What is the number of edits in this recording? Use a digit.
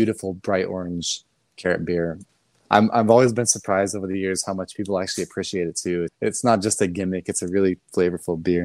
2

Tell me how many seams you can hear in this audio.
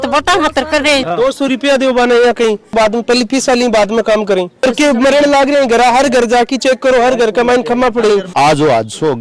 4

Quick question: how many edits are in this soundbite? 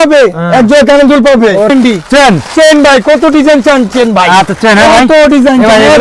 1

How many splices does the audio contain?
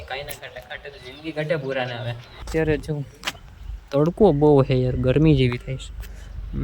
1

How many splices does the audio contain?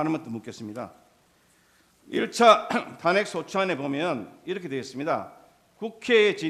0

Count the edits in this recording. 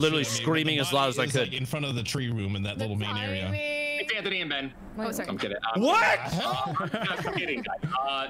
0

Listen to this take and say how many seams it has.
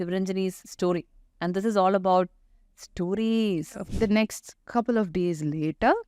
1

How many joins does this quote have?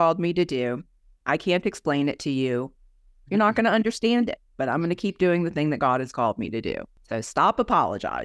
1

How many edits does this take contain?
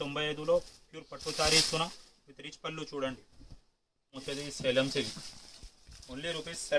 1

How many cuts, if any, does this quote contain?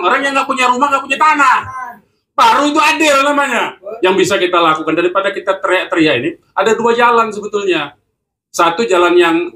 1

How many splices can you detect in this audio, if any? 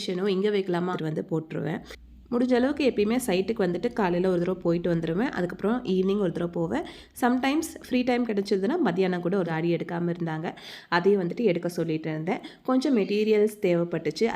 2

